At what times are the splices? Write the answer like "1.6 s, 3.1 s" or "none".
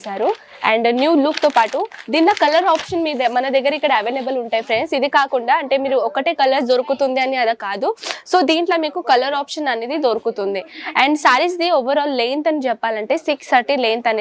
none